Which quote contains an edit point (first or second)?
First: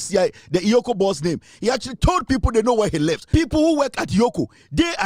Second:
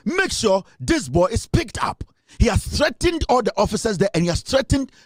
first